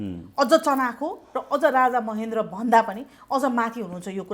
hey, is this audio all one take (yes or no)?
yes